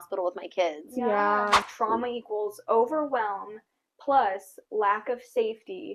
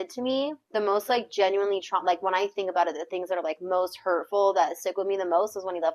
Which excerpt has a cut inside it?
first; 1 cut; at 1.6 s

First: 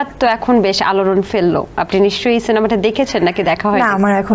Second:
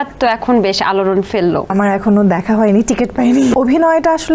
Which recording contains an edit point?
second; 2 cuts; at 1.7 s, 3.5 s

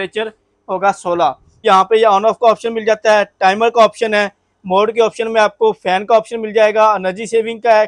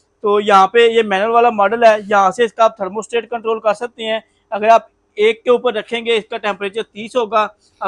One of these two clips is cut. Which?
first; 1 cut; at 1.6 s

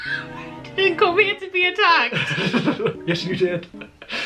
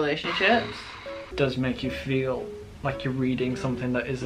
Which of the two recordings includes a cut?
second; 1 cut; at 1.2 s

